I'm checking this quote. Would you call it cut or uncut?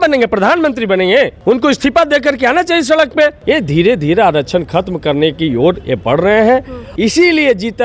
cut